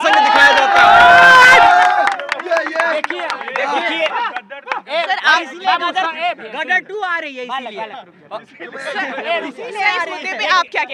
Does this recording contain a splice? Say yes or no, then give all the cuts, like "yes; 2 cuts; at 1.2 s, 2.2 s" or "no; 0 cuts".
no; 0 cuts